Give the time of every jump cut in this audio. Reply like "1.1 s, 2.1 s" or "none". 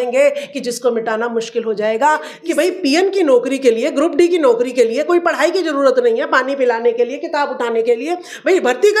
2.3 s